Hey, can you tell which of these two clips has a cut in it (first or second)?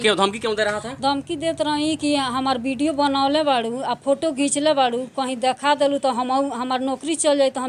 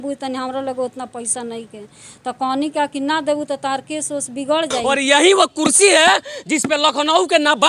second